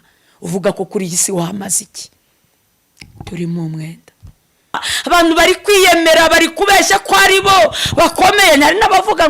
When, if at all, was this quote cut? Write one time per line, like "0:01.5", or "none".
0:04.9